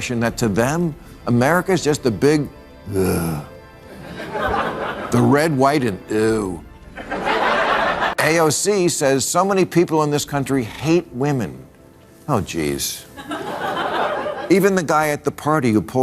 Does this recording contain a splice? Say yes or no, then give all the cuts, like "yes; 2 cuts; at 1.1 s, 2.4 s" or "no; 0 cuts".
yes; 1 cut; at 8.1 s